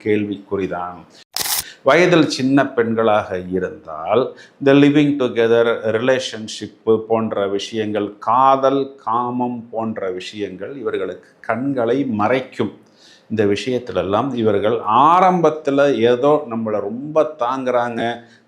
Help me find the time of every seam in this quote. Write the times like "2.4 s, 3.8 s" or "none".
1.5 s